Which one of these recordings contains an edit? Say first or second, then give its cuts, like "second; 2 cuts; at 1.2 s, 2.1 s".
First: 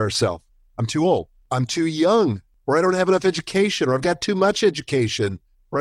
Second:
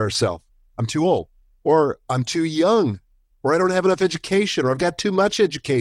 first; 2 cuts; at 1.5 s, 2.5 s